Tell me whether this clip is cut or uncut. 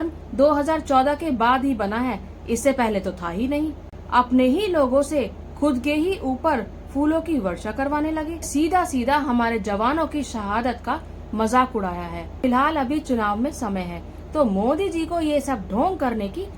cut